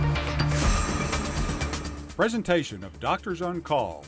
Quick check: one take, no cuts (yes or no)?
no